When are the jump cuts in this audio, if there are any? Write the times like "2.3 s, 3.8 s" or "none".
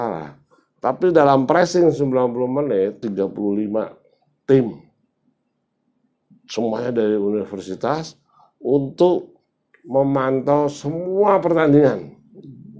3.0 s